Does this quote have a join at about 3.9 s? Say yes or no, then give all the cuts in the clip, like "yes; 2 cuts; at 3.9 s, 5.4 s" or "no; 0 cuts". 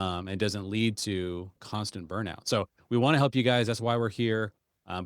no; 1 cut; at 1.6 s